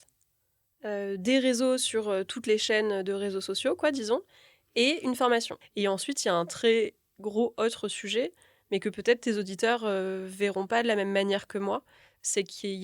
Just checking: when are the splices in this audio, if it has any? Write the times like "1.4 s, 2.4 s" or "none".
5.6 s